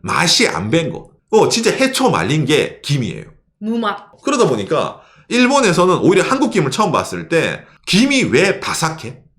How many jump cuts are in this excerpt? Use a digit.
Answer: 1